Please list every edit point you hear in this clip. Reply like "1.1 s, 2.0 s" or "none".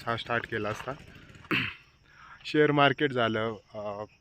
1.6 s